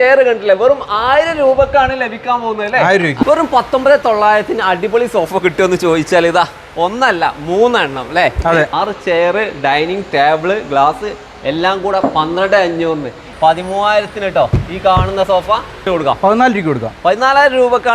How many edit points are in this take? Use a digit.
4